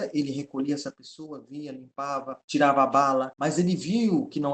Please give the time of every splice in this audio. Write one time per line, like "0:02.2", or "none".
0:02.4
0:03.3